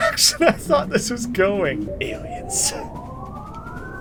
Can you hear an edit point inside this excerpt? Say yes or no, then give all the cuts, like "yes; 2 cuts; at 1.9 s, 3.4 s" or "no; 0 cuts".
no; 0 cuts